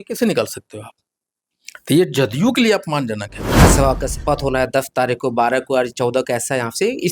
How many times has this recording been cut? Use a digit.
1